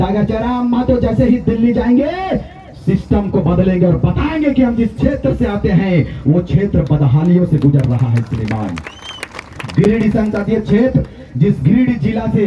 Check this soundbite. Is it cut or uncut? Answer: uncut